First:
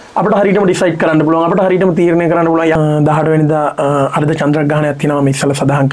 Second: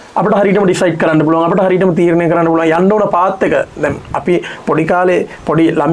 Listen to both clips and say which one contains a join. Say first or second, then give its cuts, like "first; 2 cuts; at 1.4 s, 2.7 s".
first; 1 cut; at 2.8 s